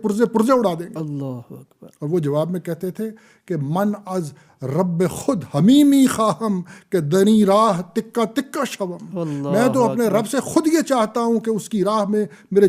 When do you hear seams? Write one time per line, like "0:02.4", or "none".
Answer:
none